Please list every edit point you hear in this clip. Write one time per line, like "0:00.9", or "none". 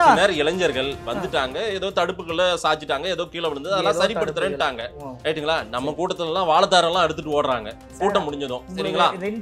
none

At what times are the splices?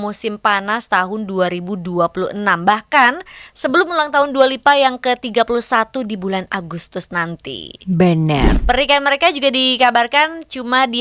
0:08.6

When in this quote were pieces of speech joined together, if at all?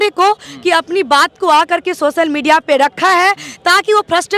none

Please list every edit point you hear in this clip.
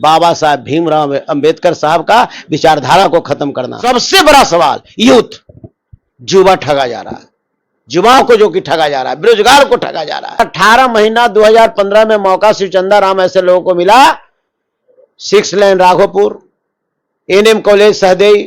0:03.8
0:10.4

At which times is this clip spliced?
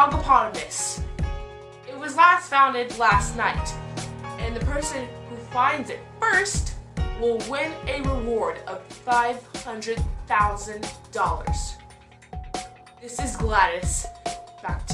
0:07.7

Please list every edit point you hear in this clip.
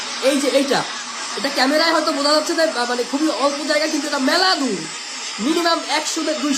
none

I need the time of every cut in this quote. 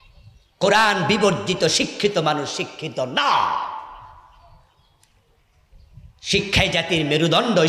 none

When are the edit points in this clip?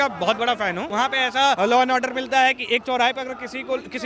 0:01.4

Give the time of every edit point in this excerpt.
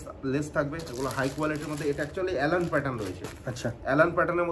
none

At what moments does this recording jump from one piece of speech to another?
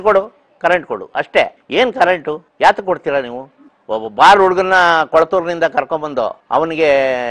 0:01.6
0:02.4
0:06.4

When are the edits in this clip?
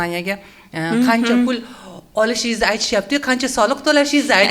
none

